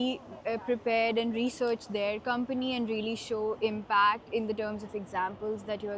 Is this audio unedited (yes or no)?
yes